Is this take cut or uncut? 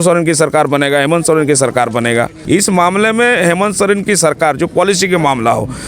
cut